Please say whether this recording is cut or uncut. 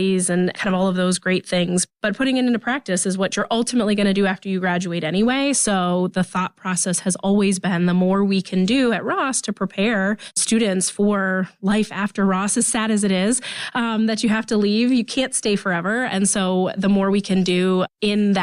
uncut